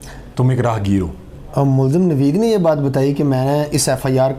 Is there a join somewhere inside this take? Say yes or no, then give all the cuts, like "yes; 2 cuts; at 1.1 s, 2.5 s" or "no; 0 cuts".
no; 0 cuts